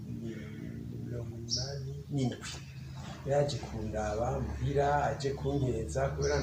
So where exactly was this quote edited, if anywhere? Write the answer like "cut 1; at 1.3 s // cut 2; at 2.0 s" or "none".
none